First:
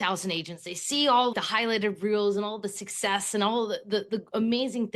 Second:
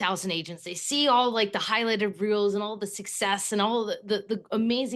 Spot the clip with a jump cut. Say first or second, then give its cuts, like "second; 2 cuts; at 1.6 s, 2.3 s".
first; 1 cut; at 1.3 s